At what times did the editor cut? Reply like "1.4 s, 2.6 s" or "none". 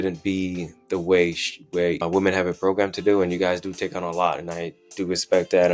2.0 s